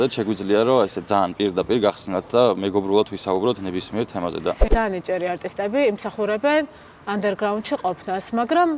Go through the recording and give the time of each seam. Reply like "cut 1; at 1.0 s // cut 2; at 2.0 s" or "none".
cut 1; at 4.6 s